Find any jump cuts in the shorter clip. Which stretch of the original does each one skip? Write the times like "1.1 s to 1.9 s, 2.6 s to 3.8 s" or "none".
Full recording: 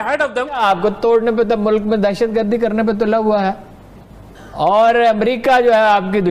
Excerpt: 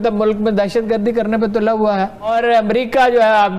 3.7 s to 4.8 s